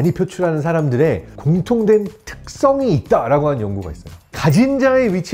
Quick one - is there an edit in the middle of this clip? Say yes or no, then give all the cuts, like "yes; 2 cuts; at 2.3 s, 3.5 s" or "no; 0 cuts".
yes; 1 cut; at 4.4 s